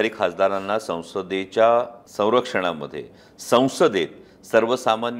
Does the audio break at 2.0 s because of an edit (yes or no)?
yes